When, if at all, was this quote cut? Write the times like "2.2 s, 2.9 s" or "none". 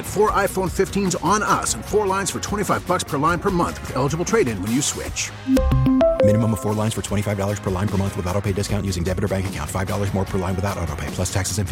none